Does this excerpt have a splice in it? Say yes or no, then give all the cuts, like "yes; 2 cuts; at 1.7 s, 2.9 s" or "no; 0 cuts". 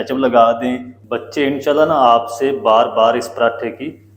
yes; 1 cut; at 0.9 s